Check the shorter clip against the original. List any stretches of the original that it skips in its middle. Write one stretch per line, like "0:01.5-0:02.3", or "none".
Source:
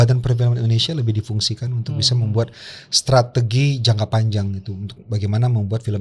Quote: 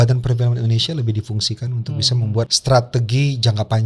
0:02.6-0:03.0